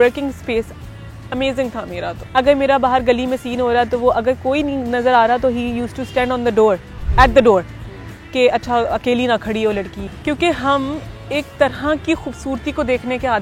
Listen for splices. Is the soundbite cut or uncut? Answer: cut